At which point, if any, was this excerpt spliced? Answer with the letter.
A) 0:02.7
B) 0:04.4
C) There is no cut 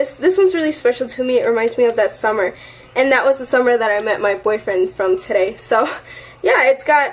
C